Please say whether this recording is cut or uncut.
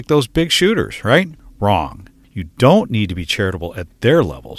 cut